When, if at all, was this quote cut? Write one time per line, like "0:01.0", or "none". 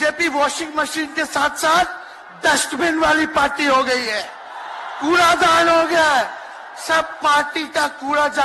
none